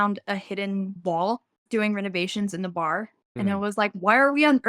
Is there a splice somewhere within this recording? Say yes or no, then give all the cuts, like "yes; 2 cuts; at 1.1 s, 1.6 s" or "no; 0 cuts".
yes; 2 cuts; at 0.9 s, 3.2 s